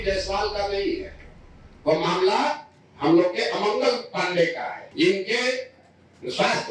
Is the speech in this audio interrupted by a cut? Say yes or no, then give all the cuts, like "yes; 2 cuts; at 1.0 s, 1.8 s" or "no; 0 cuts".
yes; 1 cut; at 4.8 s